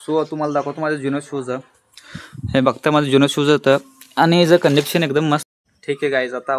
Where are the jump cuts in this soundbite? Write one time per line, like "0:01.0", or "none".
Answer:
0:05.5